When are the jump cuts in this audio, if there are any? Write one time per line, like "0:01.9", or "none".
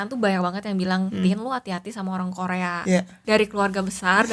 0:03.1